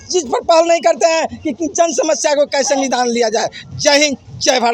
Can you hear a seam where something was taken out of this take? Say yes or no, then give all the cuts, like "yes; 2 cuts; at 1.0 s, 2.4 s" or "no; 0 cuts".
no; 0 cuts